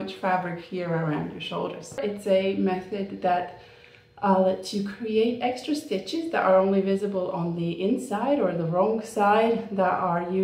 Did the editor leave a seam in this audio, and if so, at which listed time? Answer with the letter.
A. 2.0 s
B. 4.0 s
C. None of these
A